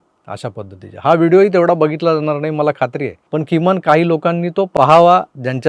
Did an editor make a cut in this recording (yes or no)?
no